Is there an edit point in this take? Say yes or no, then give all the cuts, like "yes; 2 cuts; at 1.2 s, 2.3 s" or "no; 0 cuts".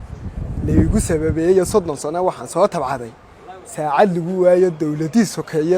no; 0 cuts